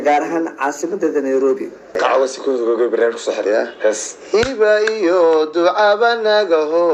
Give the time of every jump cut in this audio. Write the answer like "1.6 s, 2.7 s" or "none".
1.9 s